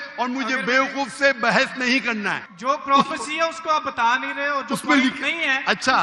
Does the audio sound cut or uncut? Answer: cut